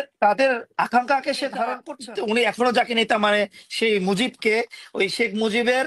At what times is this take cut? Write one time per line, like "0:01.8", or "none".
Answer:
0:01.9